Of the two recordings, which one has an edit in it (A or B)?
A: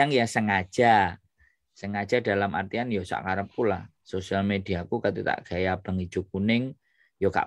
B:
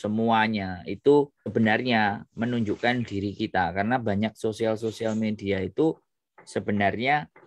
B